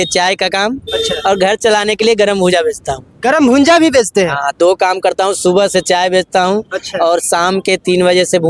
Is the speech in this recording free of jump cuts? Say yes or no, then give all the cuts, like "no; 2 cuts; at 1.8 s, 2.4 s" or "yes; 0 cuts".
yes; 0 cuts